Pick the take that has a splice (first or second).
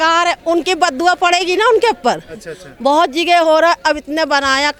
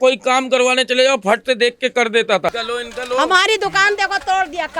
second